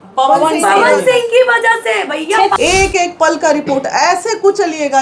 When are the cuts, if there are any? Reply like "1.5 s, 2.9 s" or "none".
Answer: 2.5 s